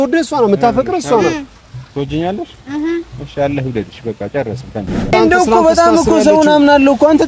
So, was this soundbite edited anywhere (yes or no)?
yes